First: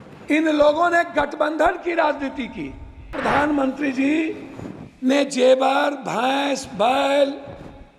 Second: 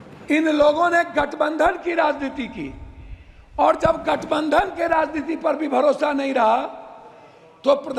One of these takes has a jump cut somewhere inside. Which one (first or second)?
first